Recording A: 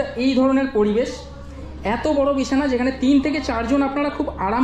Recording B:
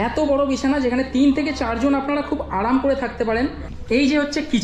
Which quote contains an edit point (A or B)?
B